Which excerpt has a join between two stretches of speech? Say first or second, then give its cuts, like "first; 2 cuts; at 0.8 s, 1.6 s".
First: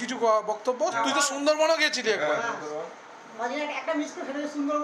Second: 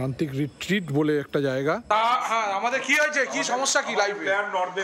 second; 1 cut; at 1.8 s